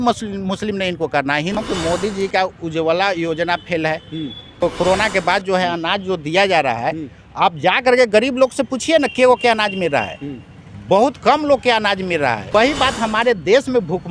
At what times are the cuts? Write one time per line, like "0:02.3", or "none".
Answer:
0:01.6
0:04.6
0:12.5